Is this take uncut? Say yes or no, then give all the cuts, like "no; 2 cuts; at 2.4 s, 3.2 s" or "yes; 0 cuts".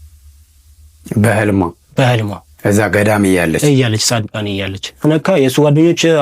no; 1 cut; at 5.0 s